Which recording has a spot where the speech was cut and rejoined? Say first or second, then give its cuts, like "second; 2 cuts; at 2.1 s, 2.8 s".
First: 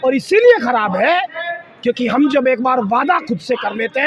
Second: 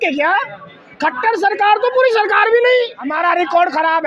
second; 1 cut; at 3.0 s